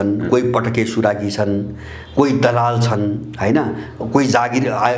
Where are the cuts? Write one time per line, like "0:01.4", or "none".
none